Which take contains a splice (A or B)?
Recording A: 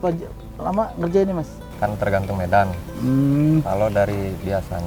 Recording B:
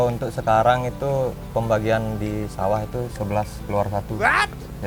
A